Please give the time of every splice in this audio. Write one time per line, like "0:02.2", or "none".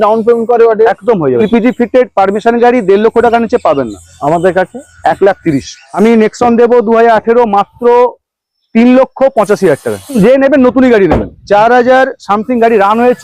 0:01.4
0:06.0
0:10.2